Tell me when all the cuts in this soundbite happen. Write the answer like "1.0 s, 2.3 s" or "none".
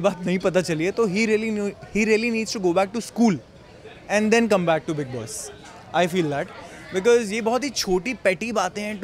none